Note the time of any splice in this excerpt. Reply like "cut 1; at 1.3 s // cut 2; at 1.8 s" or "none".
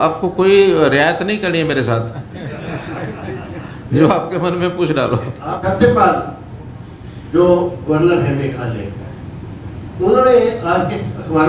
cut 1; at 5.5 s